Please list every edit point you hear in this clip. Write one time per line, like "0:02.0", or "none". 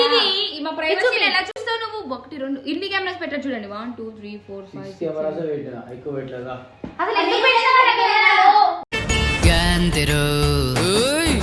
none